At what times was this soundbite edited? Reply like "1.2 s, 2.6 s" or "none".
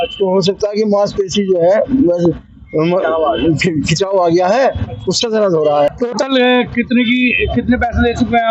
5.9 s